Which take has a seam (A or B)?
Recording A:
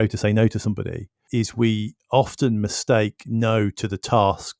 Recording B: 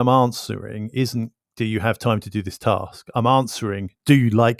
A